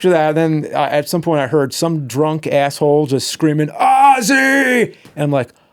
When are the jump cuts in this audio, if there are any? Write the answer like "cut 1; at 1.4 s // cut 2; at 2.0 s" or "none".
none